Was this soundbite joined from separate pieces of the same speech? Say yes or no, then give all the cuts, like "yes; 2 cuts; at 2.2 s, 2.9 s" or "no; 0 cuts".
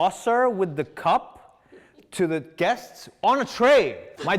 no; 0 cuts